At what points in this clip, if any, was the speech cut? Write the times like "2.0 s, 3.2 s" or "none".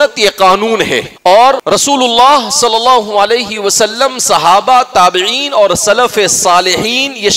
1.1 s, 1.6 s